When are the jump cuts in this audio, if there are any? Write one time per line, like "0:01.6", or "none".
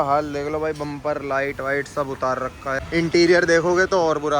0:02.8